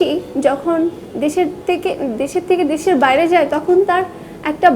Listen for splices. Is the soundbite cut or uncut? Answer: uncut